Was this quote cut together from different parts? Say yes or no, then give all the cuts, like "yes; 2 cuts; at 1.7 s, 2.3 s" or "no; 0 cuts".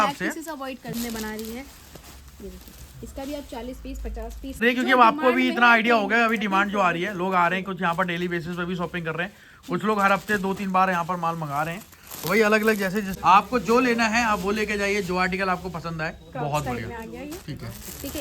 yes; 3 cuts; at 0.9 s, 4.6 s, 13.1 s